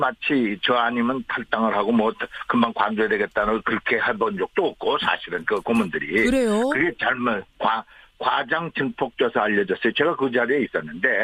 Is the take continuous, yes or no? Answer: no